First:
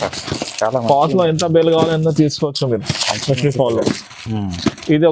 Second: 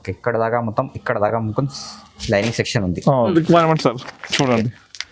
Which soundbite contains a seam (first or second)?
second